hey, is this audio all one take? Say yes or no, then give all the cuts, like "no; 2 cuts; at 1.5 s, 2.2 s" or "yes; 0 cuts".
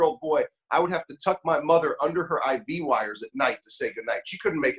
yes; 0 cuts